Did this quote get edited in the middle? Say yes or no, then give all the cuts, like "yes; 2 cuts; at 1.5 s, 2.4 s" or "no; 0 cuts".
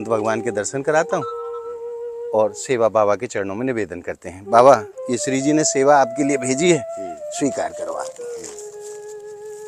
no; 0 cuts